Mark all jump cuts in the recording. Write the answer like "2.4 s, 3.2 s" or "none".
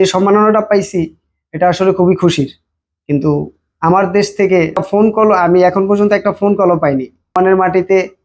4.8 s, 7.3 s